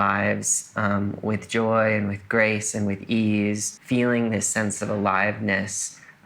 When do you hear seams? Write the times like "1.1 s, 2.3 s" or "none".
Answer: 3.7 s